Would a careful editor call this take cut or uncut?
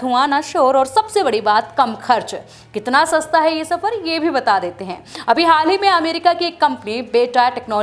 uncut